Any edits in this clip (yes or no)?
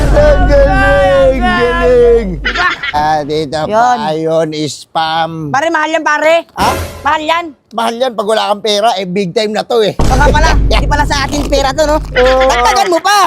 yes